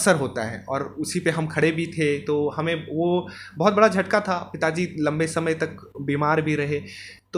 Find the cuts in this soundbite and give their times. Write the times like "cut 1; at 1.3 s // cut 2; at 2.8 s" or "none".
none